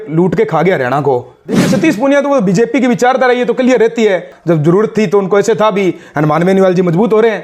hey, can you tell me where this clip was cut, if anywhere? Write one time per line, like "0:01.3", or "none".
0:01.6
0:04.3